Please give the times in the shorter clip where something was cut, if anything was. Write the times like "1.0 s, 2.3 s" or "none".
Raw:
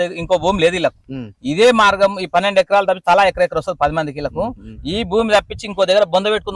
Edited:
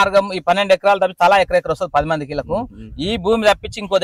none

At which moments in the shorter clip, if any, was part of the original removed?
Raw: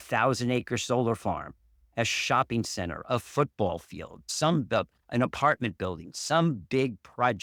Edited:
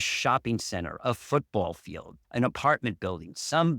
2.2 s

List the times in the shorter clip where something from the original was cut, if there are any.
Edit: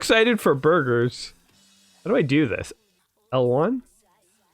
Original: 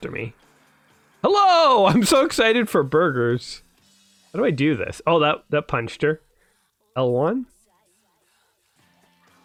2.6 s

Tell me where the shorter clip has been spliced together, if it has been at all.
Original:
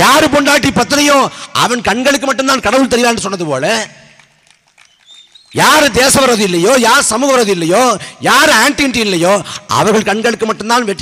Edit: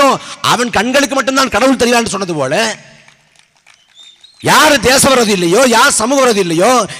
none

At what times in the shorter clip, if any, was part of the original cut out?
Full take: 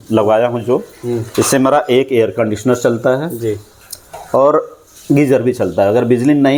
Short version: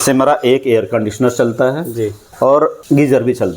2.2 s, 2.8 s

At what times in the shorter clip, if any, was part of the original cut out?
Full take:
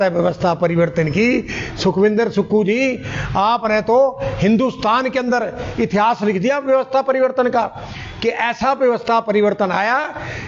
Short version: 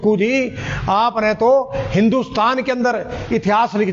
none

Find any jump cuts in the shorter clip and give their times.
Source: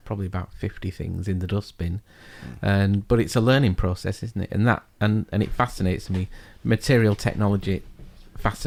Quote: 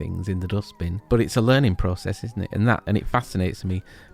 1.0 s, 2.8 s

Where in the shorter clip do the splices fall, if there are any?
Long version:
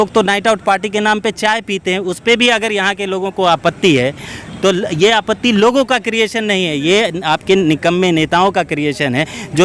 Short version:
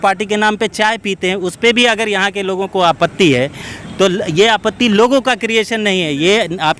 none

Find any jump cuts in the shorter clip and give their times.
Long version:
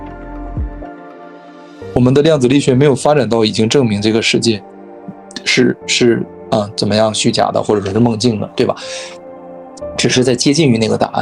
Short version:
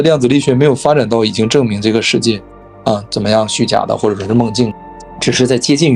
2.7 s, 4.8 s

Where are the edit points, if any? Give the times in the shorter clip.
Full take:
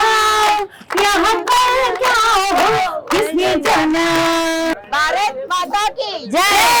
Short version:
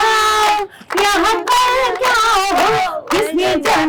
none

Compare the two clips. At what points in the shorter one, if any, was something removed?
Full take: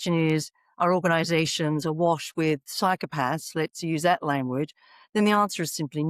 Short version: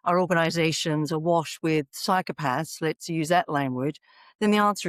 none

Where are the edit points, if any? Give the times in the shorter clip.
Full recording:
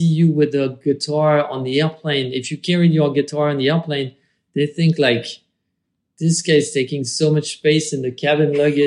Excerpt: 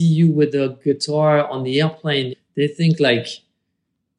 2.4 s

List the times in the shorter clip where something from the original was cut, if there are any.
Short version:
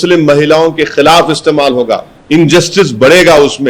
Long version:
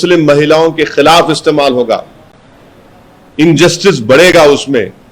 2.1 s

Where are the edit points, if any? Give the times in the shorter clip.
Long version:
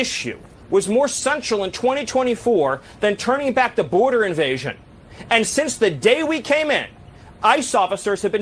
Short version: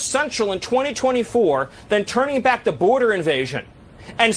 none

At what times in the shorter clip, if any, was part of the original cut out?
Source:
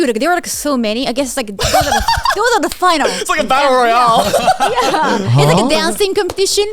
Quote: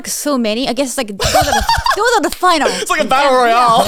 none

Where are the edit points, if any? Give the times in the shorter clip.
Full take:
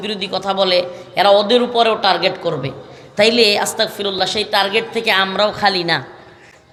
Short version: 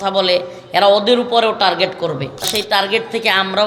2.5 s

